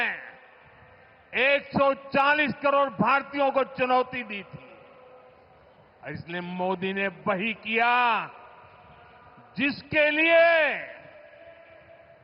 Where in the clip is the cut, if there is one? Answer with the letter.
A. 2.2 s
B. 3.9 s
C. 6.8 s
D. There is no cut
D